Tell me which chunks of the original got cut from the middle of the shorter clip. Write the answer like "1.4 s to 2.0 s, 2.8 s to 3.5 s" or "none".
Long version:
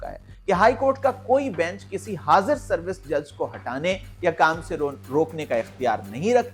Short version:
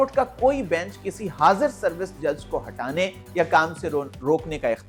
none